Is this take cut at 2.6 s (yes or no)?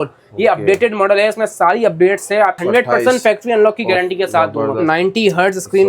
yes